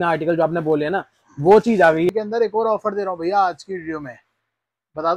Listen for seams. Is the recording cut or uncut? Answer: cut